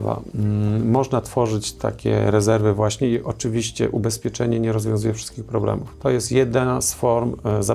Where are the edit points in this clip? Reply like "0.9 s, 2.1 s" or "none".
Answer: none